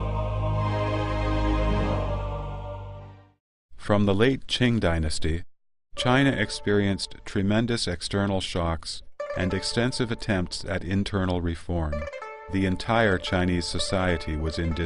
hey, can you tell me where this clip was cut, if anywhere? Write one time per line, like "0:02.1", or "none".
0:08.4

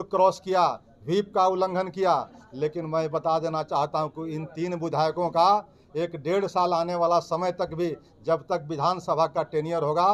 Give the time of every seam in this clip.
none

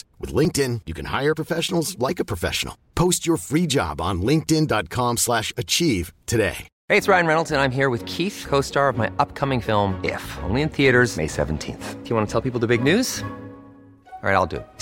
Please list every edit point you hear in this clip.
0:06.7

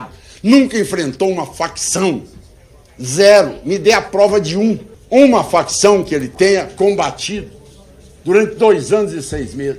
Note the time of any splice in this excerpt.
0:04.9

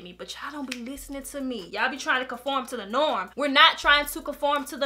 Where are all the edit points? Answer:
none

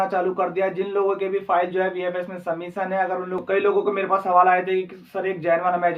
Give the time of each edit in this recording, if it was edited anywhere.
0:03.4

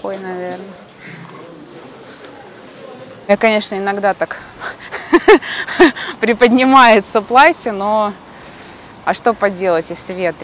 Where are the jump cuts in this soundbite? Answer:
0:03.2

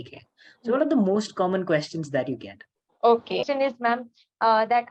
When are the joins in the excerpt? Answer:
0:03.4

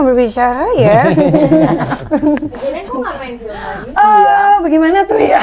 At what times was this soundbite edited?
none

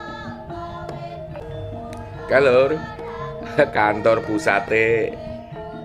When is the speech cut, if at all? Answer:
0:01.4

